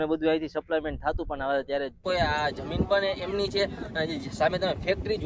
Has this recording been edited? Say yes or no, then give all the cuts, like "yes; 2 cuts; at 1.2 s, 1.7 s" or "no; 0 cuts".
yes; 1 cut; at 2.0 s